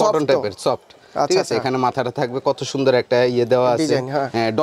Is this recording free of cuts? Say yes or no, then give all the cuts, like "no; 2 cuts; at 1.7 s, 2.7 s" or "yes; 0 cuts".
yes; 0 cuts